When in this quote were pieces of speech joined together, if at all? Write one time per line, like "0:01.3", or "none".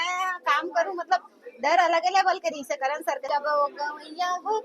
0:03.3